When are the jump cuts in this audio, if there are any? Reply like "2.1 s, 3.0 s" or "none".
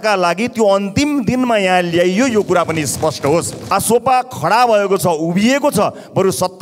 3.7 s